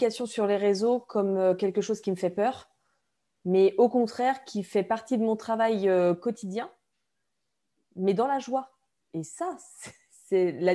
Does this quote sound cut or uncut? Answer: uncut